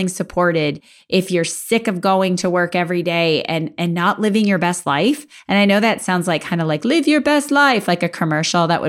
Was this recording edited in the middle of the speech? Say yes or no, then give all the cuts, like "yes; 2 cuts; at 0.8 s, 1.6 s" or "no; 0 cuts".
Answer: no; 0 cuts